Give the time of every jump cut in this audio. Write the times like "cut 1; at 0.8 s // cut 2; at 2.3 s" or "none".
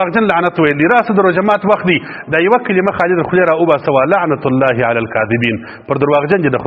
none

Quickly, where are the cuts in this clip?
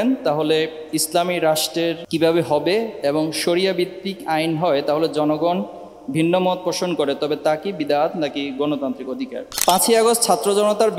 cut 1; at 2.0 s // cut 2; at 9.5 s

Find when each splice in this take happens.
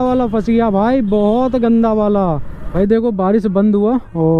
cut 1; at 2.6 s

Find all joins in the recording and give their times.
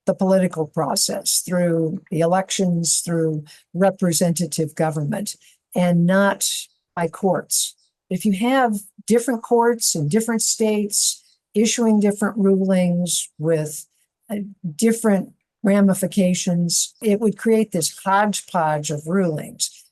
cut 1; at 17.0 s

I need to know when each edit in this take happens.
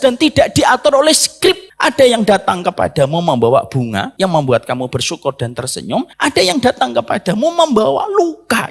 cut 1; at 1.7 s // cut 2; at 4.1 s // cut 3; at 6.1 s

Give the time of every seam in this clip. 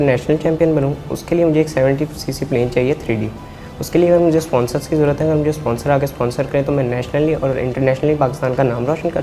none

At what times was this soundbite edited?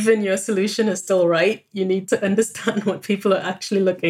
cut 1; at 2.0 s

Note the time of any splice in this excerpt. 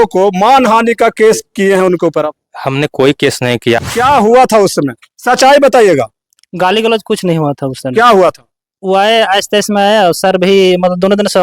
cut 1; at 3.8 s

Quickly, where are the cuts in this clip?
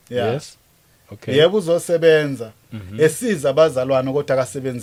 none

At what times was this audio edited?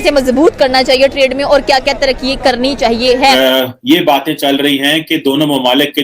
cut 1; at 3.3 s

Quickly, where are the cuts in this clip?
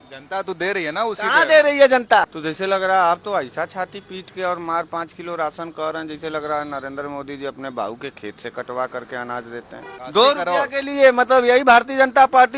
cut 1; at 2.3 s // cut 2; at 9.9 s

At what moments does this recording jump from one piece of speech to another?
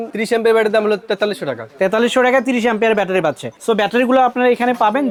none

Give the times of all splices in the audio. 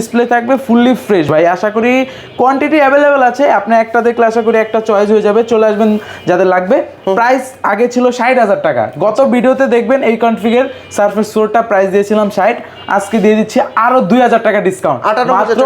none

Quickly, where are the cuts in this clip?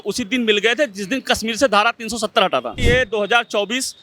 cut 1; at 2.8 s

